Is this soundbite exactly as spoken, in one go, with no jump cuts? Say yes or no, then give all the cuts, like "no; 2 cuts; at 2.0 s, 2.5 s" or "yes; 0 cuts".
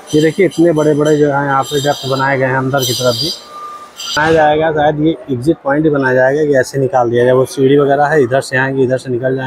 no; 1 cut; at 4.2 s